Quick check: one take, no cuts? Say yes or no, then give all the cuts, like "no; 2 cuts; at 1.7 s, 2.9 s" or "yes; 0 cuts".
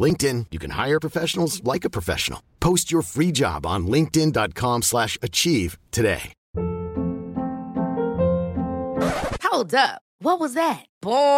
no; 1 cut; at 6.4 s